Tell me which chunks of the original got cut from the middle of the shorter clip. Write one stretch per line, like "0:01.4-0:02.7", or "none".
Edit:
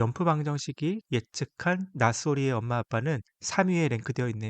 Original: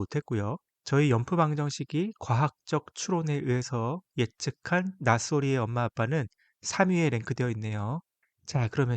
0:02.2-0:04.1
0:06.4-0:06.6